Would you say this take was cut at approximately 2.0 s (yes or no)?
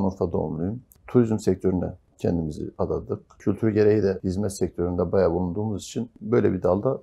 yes